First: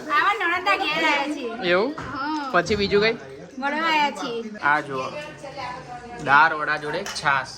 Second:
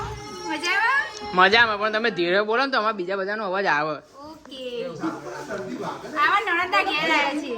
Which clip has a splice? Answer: first; 1 cut; at 4.6 s

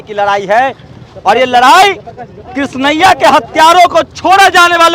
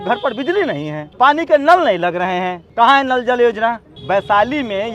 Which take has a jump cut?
second; 3 cuts; at 1.0 s, 2.6 s, 3.9 s

